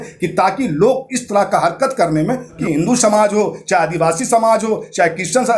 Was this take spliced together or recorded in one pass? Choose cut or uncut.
cut